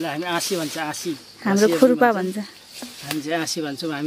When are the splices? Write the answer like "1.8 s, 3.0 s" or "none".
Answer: none